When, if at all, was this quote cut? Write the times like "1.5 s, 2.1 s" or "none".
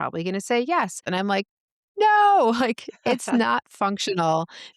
1.0 s